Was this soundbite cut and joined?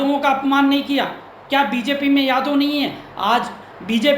no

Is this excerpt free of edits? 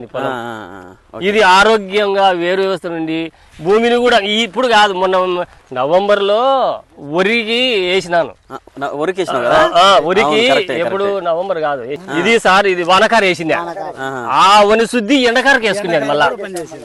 yes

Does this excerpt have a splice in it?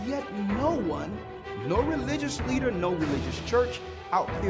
no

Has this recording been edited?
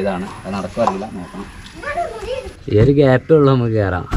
yes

